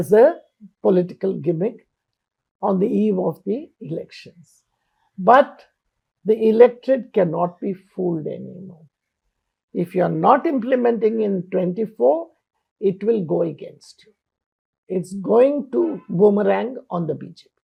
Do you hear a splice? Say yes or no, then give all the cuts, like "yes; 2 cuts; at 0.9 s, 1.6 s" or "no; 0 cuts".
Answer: no; 0 cuts